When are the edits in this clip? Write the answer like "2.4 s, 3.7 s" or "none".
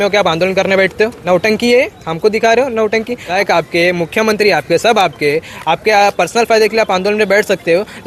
1.2 s, 3.3 s